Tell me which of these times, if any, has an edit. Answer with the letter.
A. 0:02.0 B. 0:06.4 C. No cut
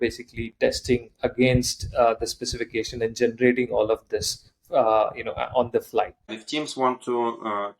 B